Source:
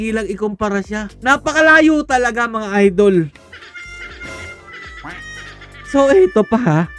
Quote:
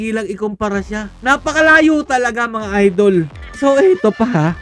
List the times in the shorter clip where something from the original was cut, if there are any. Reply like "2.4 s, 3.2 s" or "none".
3.4 s